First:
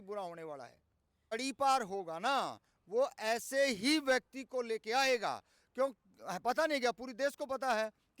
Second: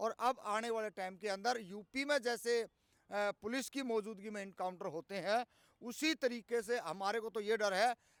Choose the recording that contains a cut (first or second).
first